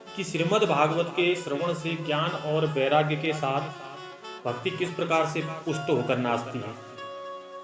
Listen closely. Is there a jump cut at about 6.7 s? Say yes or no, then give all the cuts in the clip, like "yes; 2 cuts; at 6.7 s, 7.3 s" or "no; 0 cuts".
yes; 1 cut; at 6.7 s